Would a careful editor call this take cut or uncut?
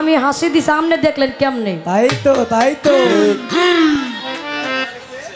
uncut